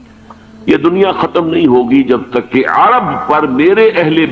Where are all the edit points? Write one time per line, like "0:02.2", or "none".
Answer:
none